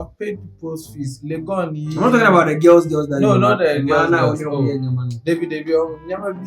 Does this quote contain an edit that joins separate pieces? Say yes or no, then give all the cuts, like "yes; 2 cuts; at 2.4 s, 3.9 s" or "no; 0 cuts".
no; 0 cuts